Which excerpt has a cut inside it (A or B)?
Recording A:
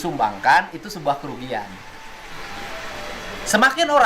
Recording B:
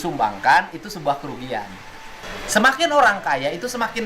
B